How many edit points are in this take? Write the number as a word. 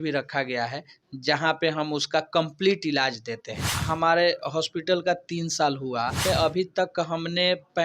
two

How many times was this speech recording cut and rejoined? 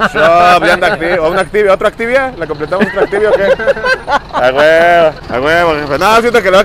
one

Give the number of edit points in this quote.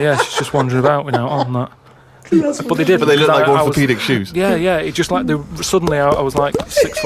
one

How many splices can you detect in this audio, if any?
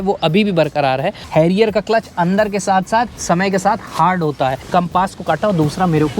two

